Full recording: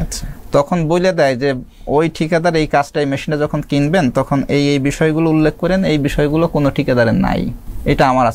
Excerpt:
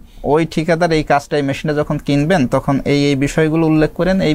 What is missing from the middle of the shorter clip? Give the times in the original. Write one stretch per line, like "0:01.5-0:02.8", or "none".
none